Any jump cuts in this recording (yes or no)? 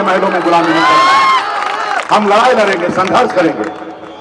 no